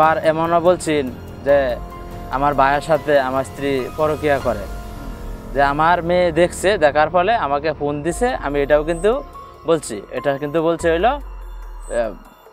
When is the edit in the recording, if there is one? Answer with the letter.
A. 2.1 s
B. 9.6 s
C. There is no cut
C